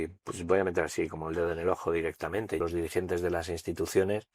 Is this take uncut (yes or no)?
no